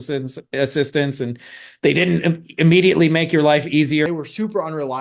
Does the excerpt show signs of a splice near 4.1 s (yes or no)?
yes